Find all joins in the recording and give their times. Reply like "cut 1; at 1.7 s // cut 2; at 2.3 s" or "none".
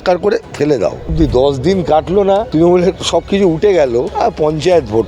cut 1; at 1.1 s // cut 2; at 2.5 s // cut 3; at 4.1 s